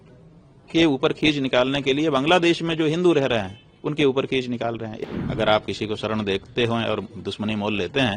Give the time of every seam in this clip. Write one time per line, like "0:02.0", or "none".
0:05.0